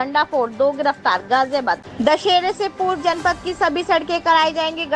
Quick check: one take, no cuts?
no; 1 cut; at 1.9 s

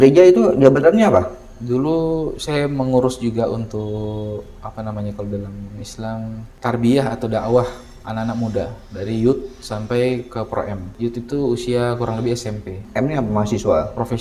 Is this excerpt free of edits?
no; 2 cuts; at 10.9 s, 12.8 s

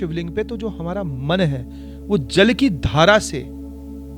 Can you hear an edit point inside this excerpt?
no; 0 cuts

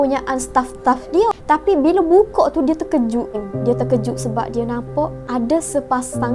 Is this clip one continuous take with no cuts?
no; 3 cuts; at 1.4 s, 3.5 s, 5.2 s

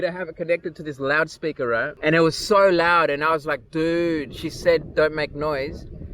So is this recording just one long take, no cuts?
no; 1 cut; at 1.9 s

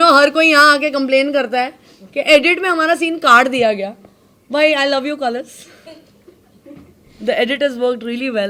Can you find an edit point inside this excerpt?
no; 0 cuts

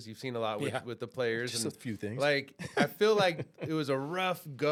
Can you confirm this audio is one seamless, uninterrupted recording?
yes; 0 cuts

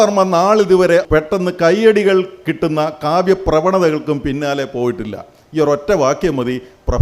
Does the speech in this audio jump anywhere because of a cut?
yes; 1 cut; at 1.1 s

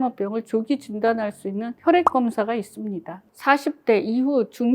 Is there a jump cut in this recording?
yes; 1 cut; at 3.2 s

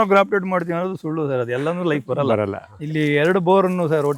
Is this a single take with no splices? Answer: no; 1 cut; at 2.7 s

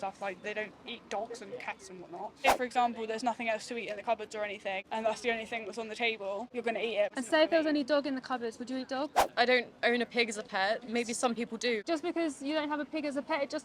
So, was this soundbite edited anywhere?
yes; 5 cuts; at 2.5 s, 4.8 s, 7.0 s, 9.2 s, 11.8 s

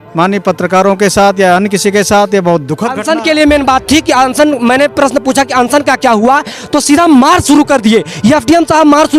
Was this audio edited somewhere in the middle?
yes; 1 cut; at 2.9 s

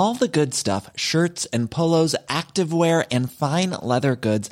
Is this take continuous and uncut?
yes; 0 cuts

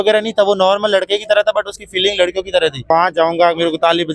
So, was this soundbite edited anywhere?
yes; 1 cut; at 2.9 s

